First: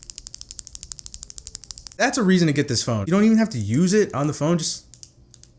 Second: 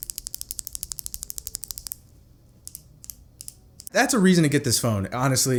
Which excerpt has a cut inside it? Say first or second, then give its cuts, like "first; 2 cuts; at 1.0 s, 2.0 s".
first; 2 cuts; at 2.0 s, 3.0 s